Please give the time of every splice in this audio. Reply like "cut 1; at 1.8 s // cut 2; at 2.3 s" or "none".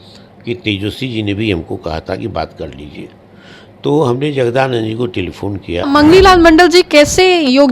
cut 1; at 5.8 s